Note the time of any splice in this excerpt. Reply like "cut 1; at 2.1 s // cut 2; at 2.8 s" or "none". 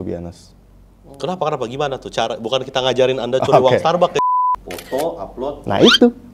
cut 1; at 4.3 s